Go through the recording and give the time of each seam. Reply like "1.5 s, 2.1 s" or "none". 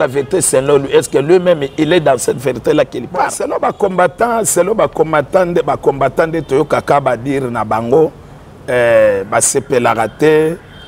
3.4 s